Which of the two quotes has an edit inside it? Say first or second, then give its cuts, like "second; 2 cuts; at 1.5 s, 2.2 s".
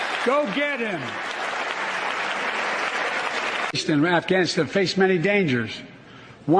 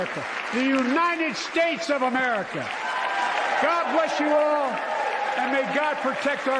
first; 1 cut; at 3.7 s